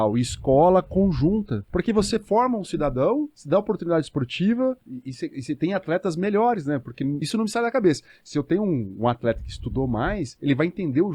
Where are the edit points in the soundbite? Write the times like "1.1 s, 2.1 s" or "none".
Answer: 1.6 s, 3.4 s, 4.9 s, 7.2 s